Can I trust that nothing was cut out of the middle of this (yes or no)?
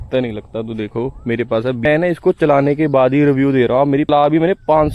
no